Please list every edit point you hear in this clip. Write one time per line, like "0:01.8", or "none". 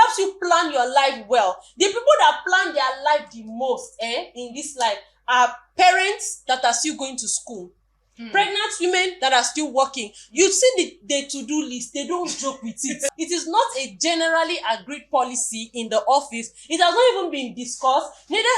0:13.1